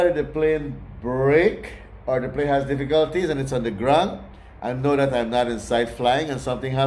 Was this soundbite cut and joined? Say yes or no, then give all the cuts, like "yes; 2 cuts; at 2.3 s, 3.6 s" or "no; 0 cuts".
no; 0 cuts